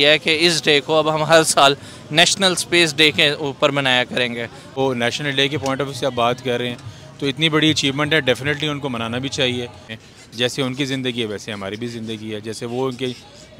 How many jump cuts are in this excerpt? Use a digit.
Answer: 2